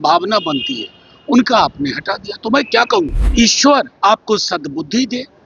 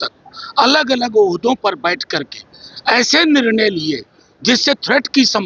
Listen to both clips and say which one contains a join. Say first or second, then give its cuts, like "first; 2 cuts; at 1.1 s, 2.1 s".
first; 1 cut; at 3.2 s